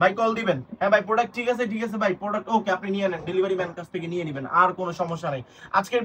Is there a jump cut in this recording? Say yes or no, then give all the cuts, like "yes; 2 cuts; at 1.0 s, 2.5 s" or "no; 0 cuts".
no; 0 cuts